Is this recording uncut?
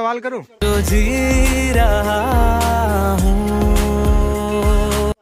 yes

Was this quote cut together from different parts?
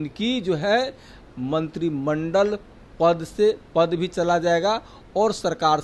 no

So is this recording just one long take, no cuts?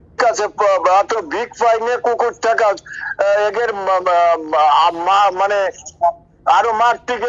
yes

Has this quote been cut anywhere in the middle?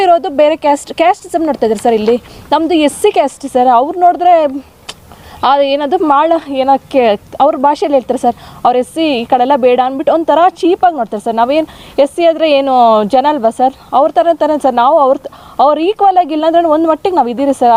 no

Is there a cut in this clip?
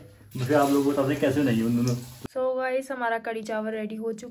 yes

